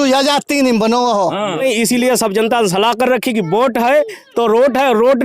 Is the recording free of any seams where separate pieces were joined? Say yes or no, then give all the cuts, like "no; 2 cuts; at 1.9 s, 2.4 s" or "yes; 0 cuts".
no; 1 cut; at 1.6 s